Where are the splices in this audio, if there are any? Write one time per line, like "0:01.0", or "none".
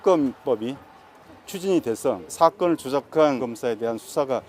0:02.3
0:03.4